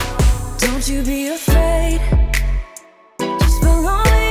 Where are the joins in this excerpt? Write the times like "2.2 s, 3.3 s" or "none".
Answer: none

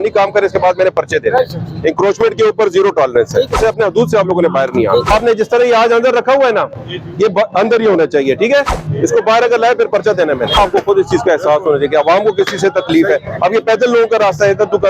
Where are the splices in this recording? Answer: 3.6 s, 5.1 s, 10.6 s

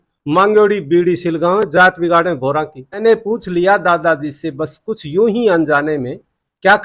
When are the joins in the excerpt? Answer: 3.0 s

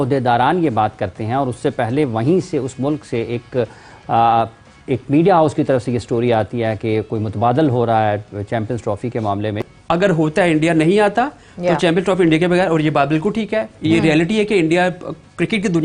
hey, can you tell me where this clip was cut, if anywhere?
9.7 s

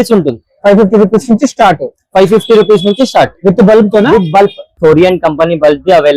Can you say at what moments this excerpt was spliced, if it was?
4.8 s

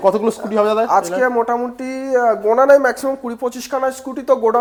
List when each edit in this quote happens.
none

